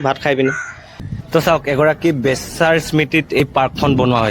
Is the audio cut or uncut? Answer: cut